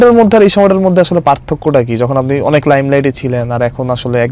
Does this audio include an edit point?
no; 0 cuts

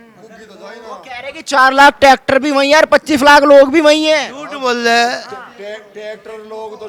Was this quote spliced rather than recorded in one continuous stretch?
no; 0 cuts

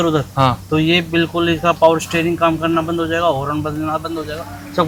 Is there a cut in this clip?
no; 0 cuts

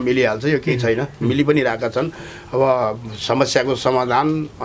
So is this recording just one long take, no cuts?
yes; 0 cuts

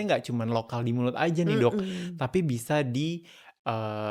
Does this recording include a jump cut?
no; 0 cuts

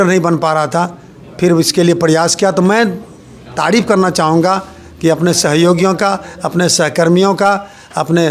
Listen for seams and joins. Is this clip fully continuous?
yes; 0 cuts

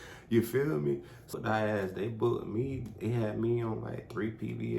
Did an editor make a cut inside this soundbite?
yes; 1 cut; at 1.4 s

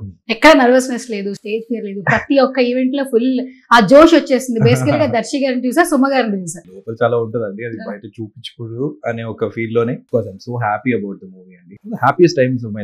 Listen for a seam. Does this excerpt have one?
yes; 3 cuts; at 6.8 s, 10.0 s, 11.7 s

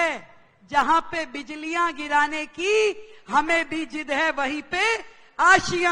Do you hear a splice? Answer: no; 0 cuts

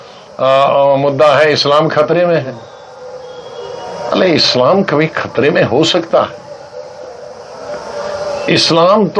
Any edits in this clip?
no; 0 cuts

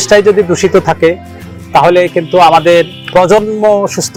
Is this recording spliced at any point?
no; 0 cuts

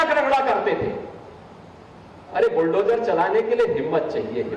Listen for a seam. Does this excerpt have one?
no; 0 cuts

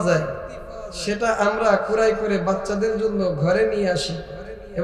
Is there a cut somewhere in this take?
no; 0 cuts

